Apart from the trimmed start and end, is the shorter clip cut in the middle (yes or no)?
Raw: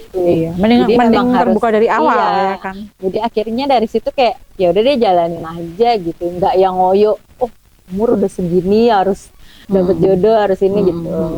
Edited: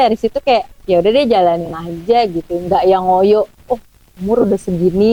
no